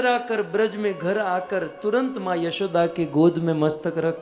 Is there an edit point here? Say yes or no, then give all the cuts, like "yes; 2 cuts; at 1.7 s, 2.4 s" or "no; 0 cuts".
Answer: no; 0 cuts